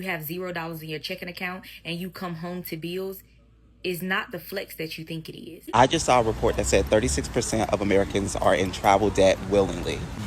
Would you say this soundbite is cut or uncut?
cut